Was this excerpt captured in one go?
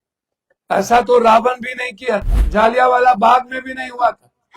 no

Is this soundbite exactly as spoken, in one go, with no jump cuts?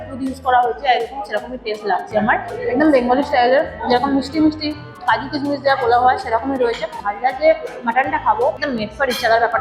no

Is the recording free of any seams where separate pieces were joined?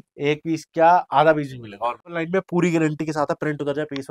no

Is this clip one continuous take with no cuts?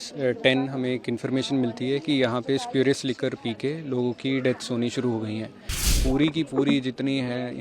no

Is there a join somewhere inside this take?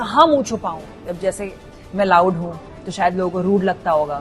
yes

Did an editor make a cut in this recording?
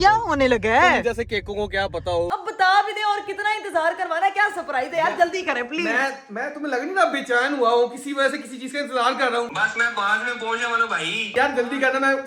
yes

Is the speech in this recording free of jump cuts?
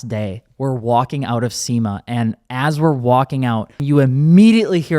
no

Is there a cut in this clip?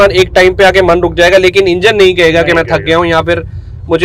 no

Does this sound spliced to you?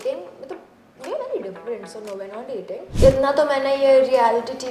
yes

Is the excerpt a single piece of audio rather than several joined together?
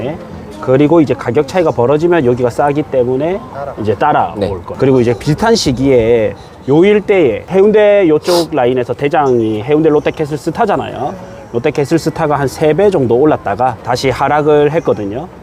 no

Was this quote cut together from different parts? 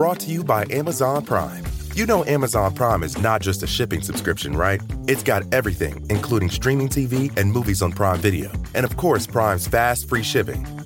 no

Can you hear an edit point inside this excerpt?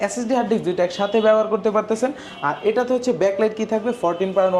no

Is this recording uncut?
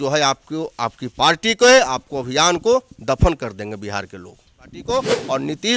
no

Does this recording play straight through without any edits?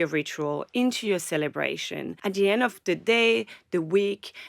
no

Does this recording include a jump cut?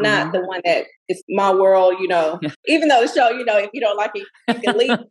yes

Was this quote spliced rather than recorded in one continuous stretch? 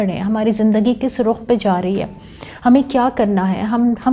no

